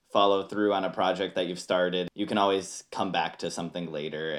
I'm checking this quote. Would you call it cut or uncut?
cut